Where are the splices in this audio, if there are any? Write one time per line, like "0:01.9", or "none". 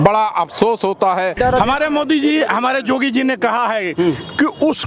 0:01.4